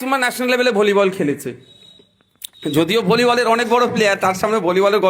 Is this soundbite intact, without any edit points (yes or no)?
yes